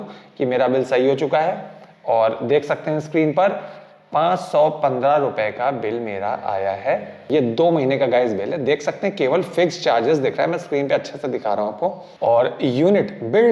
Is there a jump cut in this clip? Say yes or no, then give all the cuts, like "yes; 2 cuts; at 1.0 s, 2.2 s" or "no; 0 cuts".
yes; 1 cut; at 7.3 s